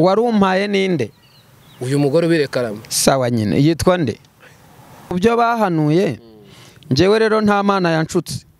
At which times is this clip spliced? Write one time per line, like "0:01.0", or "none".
0:05.1

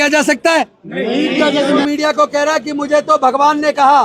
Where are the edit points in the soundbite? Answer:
0:01.8

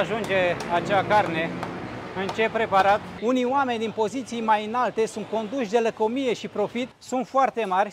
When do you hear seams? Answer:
0:03.1
0:07.0

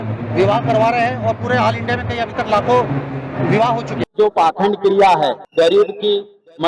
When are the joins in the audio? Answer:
0:04.0
0:05.4

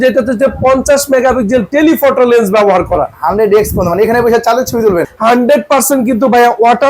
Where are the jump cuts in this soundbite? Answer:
0:05.1

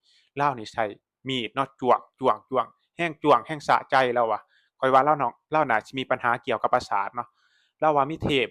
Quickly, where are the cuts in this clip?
none

